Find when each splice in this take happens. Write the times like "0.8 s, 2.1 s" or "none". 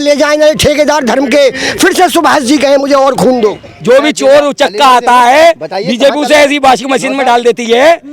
3.6 s